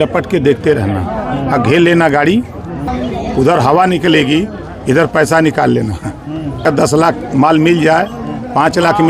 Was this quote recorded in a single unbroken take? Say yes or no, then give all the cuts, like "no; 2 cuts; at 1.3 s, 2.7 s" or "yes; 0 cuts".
no; 2 cuts; at 2.9 s, 6.7 s